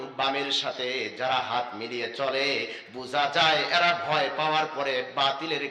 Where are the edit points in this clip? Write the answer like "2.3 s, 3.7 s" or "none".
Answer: none